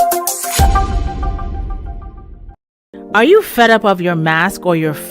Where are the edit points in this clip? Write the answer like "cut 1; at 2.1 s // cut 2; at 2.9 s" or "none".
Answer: cut 1; at 2.9 s

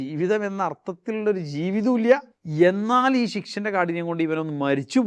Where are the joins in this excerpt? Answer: cut 1; at 2.4 s

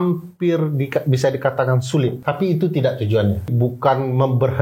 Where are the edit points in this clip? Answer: cut 1; at 2.2 s // cut 2; at 3.5 s

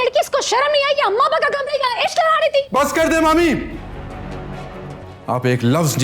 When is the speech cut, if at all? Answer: cut 1; at 4.9 s

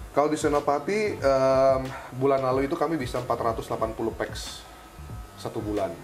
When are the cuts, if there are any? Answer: none

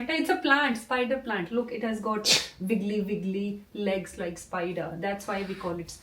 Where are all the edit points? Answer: none

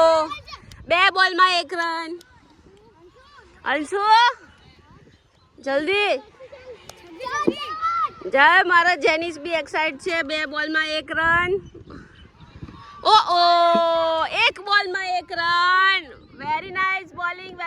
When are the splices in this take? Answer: none

